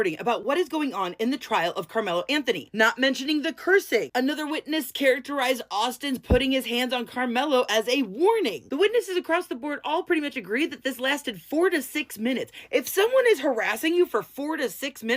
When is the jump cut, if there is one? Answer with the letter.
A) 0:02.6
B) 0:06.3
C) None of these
A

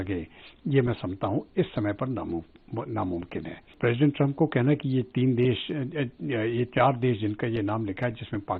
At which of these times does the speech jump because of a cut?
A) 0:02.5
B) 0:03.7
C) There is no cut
B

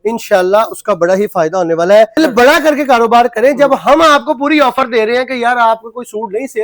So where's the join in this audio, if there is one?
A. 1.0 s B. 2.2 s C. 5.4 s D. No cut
B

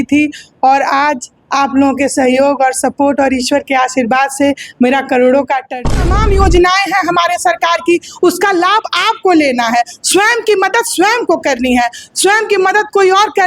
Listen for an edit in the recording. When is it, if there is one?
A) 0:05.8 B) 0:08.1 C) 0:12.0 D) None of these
A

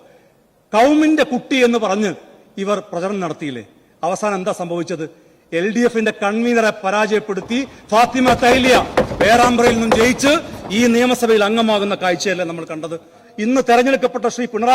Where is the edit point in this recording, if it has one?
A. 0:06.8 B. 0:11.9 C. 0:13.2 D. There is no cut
C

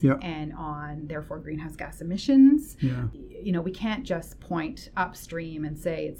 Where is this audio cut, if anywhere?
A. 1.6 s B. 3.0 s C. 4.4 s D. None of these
B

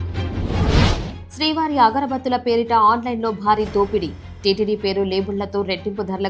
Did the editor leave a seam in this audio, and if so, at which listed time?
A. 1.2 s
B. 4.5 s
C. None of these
A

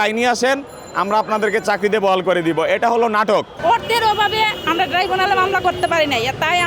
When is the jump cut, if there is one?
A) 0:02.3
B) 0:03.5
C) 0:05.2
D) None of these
B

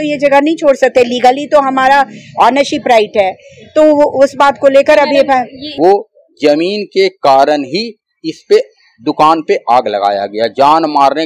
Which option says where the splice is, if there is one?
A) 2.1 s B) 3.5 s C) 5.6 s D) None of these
C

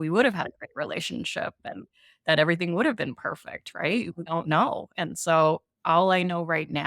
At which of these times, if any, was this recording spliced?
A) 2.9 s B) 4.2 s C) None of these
B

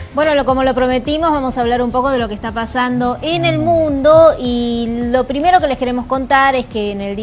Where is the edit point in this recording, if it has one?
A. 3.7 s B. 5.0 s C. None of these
B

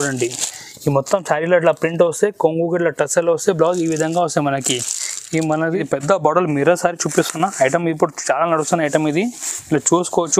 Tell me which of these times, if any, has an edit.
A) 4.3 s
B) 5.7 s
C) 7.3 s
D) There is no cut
B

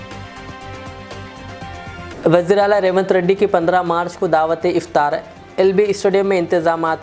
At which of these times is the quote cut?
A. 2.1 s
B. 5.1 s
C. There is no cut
C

